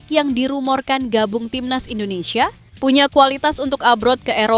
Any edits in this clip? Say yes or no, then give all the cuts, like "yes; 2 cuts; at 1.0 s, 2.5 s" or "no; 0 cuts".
yes; 1 cut; at 2.6 s